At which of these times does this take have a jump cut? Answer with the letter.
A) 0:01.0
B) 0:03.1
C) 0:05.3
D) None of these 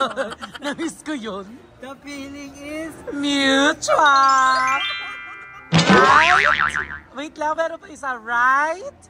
D